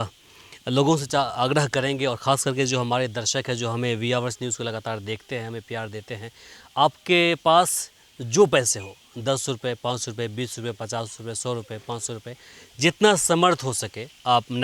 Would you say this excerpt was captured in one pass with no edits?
yes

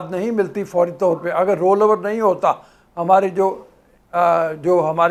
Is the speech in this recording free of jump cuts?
yes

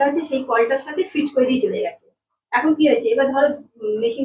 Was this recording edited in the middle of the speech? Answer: no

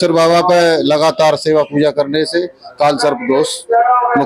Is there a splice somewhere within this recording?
no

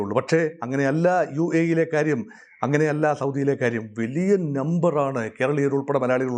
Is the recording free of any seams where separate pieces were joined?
yes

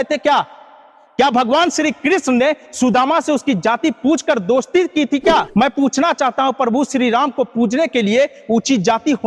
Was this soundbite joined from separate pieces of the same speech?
yes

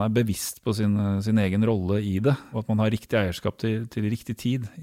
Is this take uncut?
no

